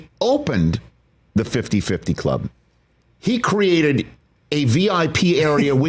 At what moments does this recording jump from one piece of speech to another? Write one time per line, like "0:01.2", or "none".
none